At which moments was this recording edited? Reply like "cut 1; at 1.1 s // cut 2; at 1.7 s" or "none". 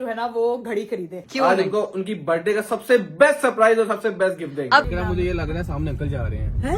cut 1; at 1.2 s // cut 2; at 4.8 s